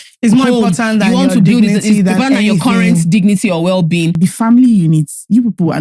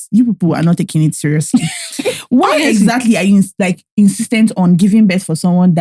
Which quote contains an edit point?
first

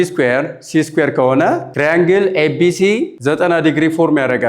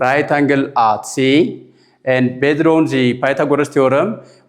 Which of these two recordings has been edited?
first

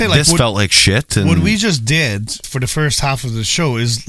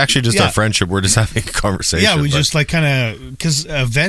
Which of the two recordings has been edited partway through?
first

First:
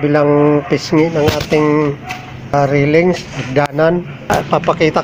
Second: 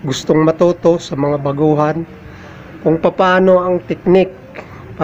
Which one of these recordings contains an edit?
first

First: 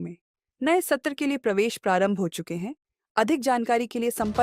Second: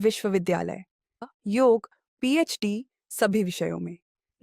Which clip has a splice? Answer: second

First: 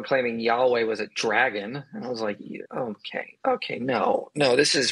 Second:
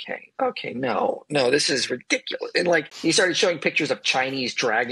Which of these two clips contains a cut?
second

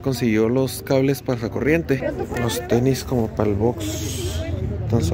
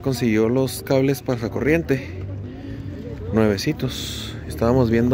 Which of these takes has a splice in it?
first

